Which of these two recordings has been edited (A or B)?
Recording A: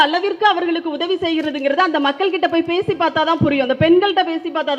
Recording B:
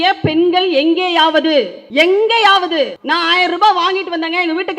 B